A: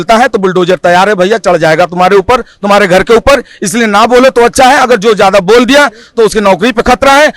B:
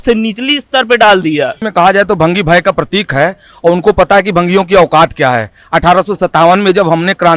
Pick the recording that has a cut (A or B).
B